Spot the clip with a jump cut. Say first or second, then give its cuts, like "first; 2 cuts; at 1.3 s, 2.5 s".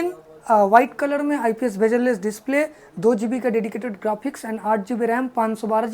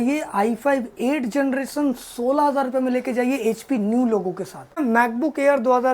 second; 1 cut; at 4.8 s